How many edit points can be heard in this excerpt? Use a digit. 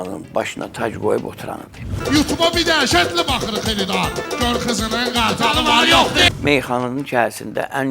2